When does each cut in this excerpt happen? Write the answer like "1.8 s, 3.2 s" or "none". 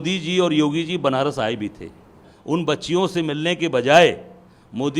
2.3 s